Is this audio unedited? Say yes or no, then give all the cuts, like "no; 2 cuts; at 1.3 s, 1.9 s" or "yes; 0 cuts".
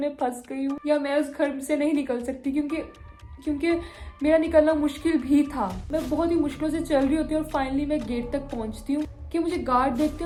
yes; 0 cuts